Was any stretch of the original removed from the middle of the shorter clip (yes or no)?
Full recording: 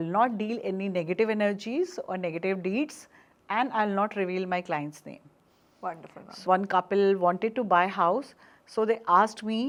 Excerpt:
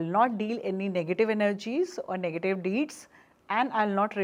no